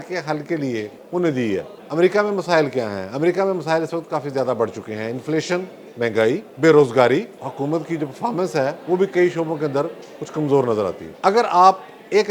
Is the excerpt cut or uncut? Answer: cut